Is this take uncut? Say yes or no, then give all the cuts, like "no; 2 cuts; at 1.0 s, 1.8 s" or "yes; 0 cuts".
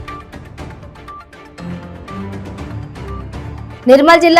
no; 1 cut; at 1.4 s